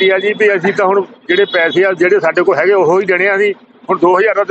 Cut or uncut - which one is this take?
uncut